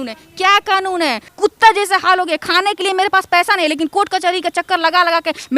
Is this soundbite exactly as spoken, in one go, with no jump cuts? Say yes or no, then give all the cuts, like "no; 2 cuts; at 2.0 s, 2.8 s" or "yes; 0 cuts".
no; 1 cut; at 1.3 s